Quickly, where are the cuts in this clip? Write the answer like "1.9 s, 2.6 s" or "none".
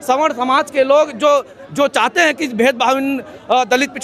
none